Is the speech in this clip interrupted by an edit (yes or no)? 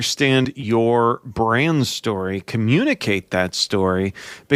no